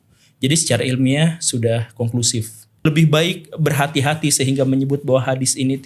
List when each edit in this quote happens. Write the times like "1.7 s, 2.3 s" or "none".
2.9 s